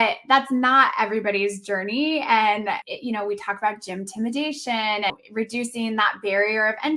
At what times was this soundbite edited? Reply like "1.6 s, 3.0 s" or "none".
5.1 s